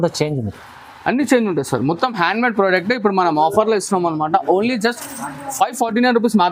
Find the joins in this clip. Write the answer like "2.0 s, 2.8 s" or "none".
none